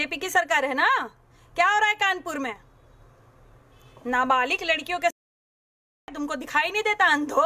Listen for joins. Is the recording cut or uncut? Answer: uncut